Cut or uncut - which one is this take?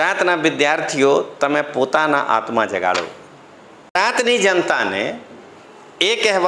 cut